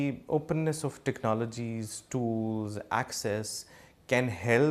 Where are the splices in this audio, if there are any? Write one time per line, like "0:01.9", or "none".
none